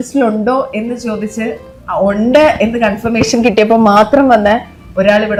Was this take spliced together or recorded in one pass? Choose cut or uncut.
uncut